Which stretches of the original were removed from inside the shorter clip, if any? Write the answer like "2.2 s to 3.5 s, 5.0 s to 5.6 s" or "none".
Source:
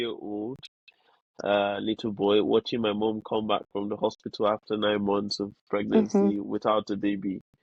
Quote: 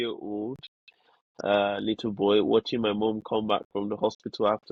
none